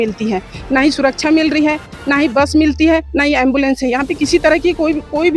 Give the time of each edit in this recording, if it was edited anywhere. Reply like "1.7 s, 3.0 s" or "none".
none

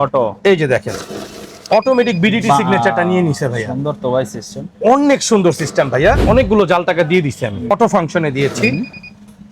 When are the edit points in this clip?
6.2 s, 7.6 s

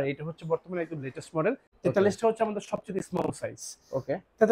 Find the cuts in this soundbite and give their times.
1.7 s

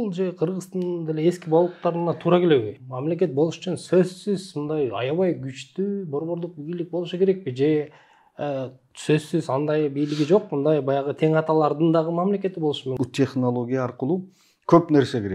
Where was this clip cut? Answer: 2.7 s, 12.9 s

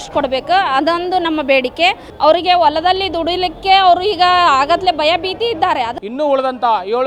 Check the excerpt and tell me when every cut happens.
6.0 s

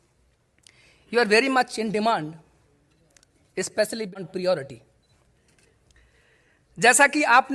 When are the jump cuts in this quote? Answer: 4.1 s

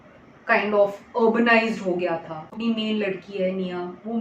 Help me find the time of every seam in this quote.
2.6 s

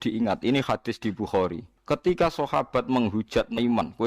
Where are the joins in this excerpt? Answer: 1.7 s

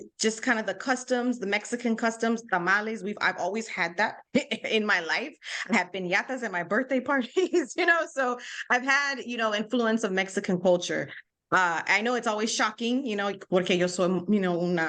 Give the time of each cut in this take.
none

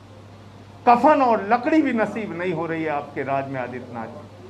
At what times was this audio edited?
none

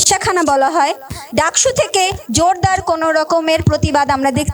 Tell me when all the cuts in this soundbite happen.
none

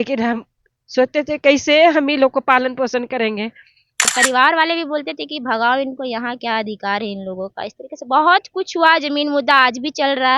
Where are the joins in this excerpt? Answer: 4.1 s

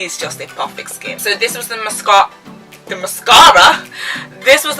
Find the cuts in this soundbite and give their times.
1.1 s

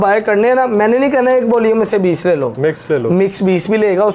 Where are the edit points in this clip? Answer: none

